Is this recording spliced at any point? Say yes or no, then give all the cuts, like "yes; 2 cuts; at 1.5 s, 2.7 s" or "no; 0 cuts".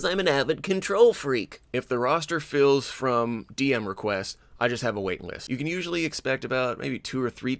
no; 0 cuts